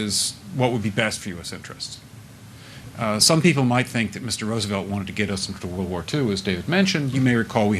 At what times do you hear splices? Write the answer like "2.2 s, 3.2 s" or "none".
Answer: 2.3 s, 6.4 s